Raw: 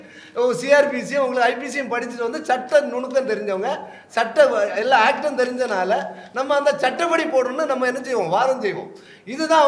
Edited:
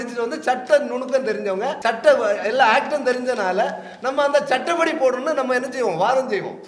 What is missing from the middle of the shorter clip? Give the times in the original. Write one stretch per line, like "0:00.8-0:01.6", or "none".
0:03.8-0:04.1